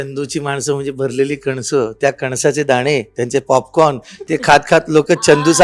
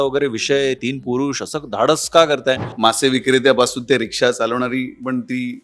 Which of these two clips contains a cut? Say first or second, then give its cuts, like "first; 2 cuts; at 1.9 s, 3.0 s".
second; 1 cut; at 2.7 s